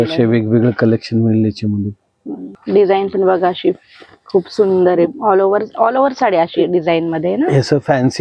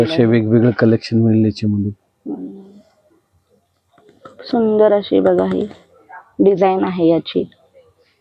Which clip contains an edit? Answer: first; 1 cut; at 2.5 s

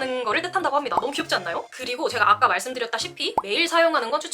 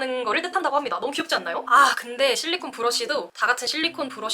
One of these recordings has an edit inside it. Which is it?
second; 1 cut; at 1.7 s

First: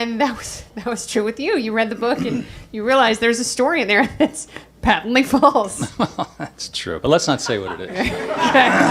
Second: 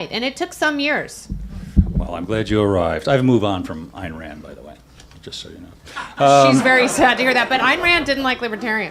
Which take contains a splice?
second; 1 cut; at 4.7 s

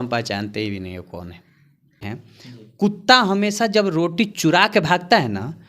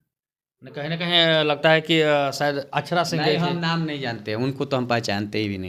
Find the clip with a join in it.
first; 1 cut; at 2.0 s

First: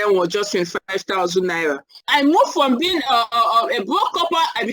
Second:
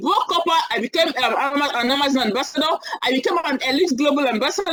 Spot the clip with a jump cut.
first; 1 cut; at 2.0 s

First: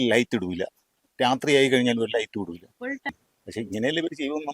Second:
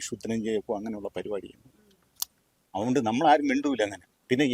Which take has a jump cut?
first; 1 cut; at 3.1 s

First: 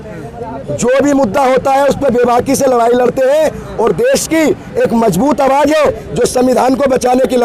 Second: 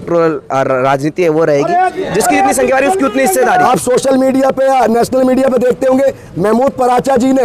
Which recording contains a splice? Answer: second; 2 cuts; at 2.0 s, 3.7 s

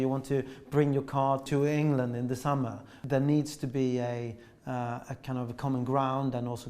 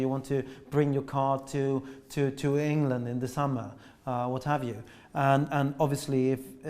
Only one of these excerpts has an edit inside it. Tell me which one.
first; 2 cuts; at 1.5 s, 3.0 s

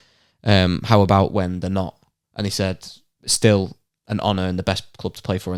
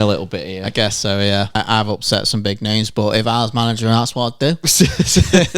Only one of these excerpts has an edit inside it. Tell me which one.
second; 1 cut; at 1.6 s

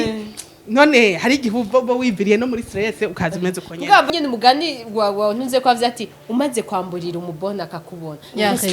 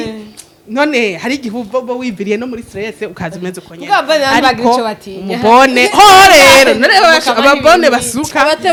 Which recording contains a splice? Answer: first; 1 cut; at 4.1 s

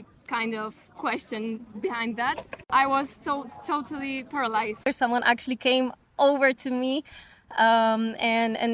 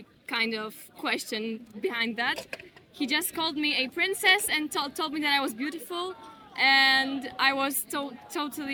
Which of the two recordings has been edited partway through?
first; 2 cuts; at 2.6 s, 4.9 s

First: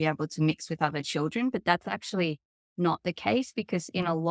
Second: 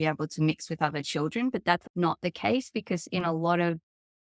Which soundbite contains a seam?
second; 1 cut; at 1.9 s

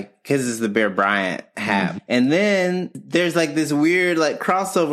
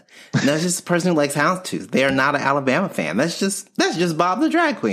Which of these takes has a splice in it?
first; 2 cuts; at 2.0 s, 3.0 s

